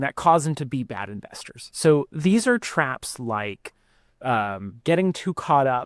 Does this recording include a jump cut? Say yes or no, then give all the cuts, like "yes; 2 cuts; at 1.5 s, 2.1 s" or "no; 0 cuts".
no; 0 cuts